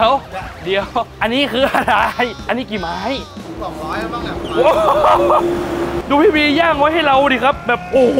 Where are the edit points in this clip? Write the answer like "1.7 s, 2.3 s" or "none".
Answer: 3.5 s, 6.0 s